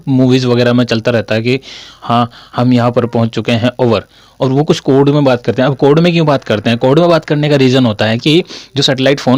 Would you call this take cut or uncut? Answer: uncut